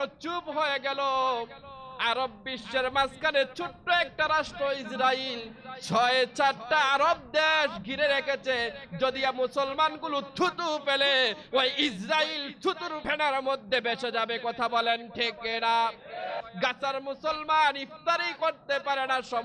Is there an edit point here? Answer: yes; 2 cuts; at 13.0 s, 16.4 s

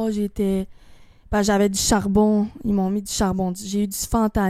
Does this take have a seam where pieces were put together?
no; 0 cuts

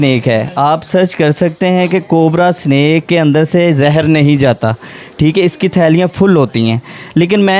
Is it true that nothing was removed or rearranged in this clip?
yes; 0 cuts

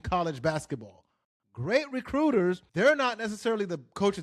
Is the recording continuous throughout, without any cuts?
no; 1 cut; at 2.7 s

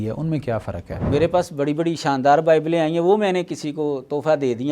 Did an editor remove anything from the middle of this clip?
yes; 1 cut; at 1.0 s

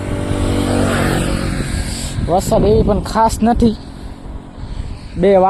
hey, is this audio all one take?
yes; 0 cuts

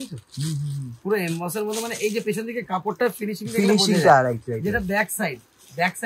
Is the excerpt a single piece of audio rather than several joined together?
yes; 0 cuts

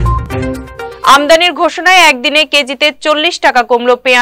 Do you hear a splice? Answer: yes; 1 cut; at 0.9 s

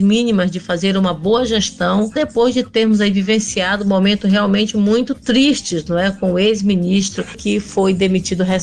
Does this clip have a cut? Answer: yes; 2 cuts; at 2.1 s, 7.4 s

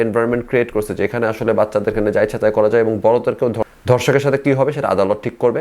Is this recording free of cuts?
no; 1 cut; at 3.6 s

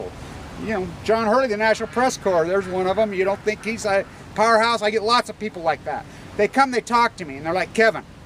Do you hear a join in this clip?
no; 0 cuts

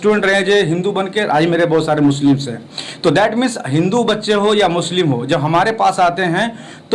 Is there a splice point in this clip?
no; 0 cuts

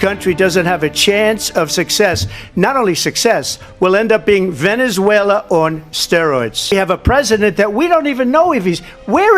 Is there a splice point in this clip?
yes; 1 cut; at 6.7 s

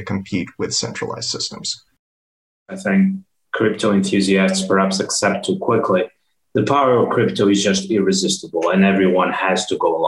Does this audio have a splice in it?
yes; 1 cut; at 2.5 s

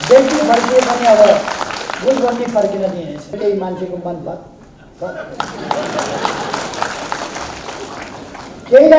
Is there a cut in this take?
yes; 1 cut; at 3.4 s

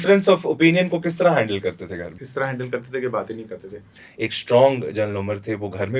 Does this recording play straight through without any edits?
no; 2 cuts; at 2.2 s, 4.0 s

